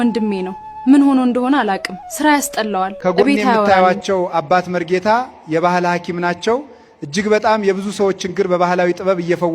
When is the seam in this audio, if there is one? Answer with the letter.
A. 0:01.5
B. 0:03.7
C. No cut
B